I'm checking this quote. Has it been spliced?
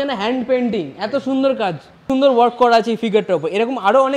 yes; 1 cut; at 2.0 s

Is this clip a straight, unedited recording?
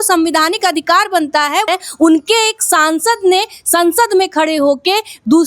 no; 1 cut; at 1.7 s

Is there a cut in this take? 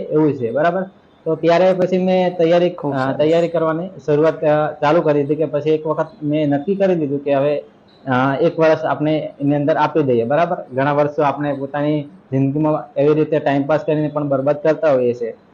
no; 0 cuts

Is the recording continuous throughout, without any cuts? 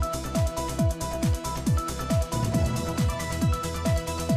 yes; 0 cuts

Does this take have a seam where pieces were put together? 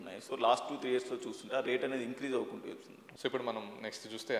yes; 1 cut; at 3.0 s

